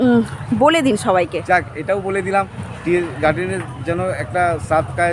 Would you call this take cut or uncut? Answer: uncut